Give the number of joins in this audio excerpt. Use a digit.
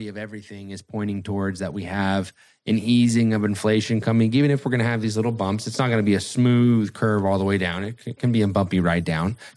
0